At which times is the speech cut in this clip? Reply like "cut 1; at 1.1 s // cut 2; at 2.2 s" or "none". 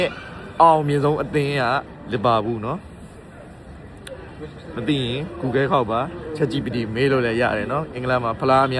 cut 1; at 1.9 s